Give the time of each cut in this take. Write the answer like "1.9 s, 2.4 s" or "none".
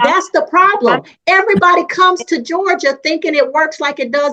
none